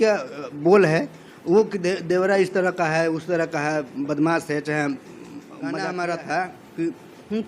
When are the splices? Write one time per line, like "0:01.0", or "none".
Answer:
0:05.7